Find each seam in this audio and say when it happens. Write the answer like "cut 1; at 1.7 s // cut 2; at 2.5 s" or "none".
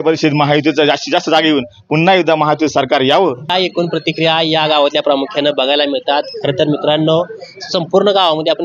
none